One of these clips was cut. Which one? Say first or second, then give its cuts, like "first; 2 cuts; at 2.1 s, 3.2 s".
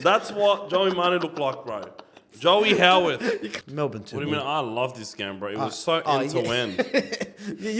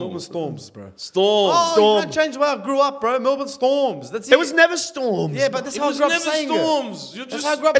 first; 1 cut; at 3.5 s